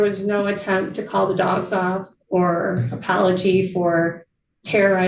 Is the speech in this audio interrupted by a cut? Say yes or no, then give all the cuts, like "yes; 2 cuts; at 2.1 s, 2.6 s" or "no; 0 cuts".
no; 0 cuts